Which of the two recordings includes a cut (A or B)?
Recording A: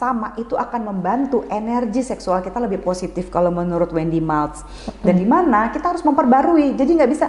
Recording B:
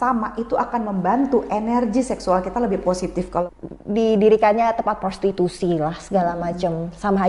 B